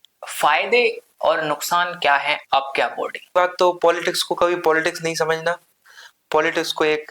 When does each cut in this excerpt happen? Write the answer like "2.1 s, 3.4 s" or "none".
3.3 s